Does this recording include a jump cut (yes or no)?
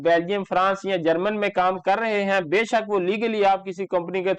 no